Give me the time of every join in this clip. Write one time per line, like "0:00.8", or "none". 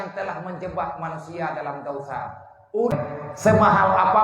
0:02.8